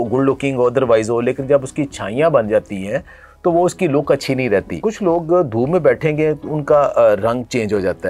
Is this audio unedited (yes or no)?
no